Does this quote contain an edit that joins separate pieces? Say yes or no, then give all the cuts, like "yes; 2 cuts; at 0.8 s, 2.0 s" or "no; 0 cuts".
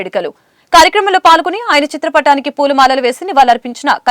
no; 0 cuts